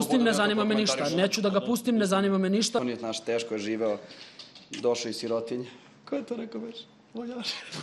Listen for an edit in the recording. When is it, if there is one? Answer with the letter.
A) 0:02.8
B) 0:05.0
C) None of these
A